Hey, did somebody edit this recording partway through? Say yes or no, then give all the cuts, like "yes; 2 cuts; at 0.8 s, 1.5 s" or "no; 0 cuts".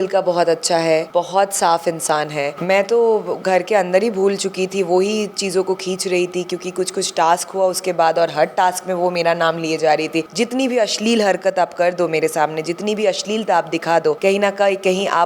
yes; 4 cuts; at 1.1 s, 2.6 s, 10.3 s, 14.2 s